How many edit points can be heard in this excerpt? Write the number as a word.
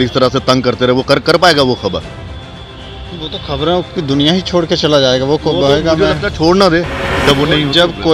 one